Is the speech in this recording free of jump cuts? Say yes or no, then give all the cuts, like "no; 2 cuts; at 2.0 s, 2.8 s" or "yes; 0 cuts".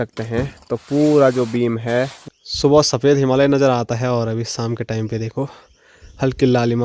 no; 1 cut; at 2.2 s